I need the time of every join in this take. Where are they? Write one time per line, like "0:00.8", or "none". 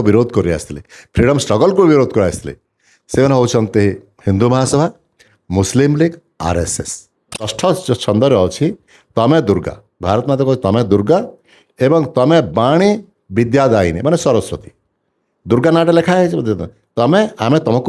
0:07.5